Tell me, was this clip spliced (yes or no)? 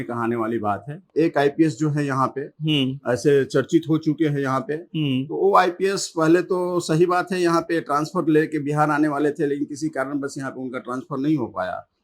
yes